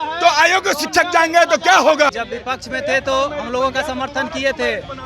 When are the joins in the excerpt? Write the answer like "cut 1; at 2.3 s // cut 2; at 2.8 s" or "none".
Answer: cut 1; at 2.1 s